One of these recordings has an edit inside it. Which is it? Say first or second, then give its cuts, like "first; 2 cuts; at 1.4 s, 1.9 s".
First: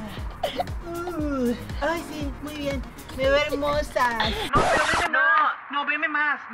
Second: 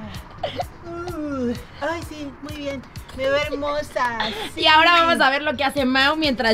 first; 1 cut; at 4.4 s